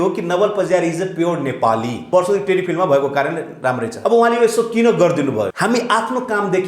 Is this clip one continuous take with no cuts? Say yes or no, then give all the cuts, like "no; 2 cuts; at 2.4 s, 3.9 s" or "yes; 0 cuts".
no; 3 cuts; at 2.0 s, 3.9 s, 5.5 s